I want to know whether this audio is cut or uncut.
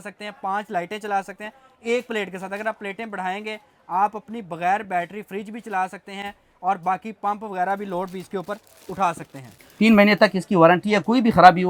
uncut